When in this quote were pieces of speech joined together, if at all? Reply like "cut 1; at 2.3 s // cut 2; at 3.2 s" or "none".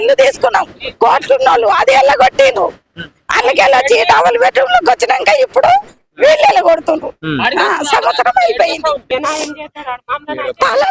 cut 1; at 9.0 s